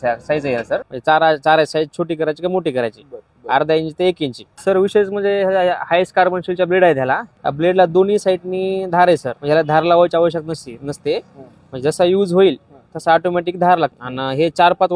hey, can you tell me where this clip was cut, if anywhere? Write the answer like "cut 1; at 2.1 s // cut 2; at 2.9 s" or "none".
cut 1; at 0.9 s // cut 2; at 4.5 s // cut 3; at 7.3 s // cut 4; at 9.3 s // cut 5; at 14.1 s